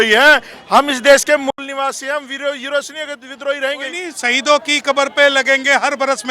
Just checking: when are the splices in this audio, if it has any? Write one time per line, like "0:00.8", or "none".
0:04.1